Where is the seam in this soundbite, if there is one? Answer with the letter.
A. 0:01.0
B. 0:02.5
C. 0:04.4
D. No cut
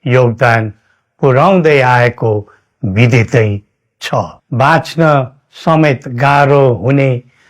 C